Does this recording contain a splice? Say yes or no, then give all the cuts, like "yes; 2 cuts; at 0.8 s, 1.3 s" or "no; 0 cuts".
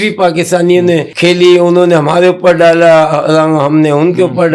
yes; 1 cut; at 1.1 s